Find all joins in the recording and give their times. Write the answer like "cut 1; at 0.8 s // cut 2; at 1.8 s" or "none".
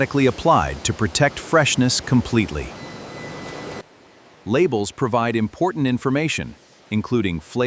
none